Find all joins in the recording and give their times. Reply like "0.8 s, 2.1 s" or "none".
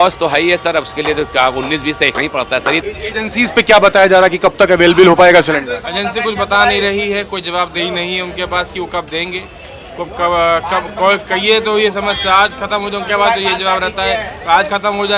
2.8 s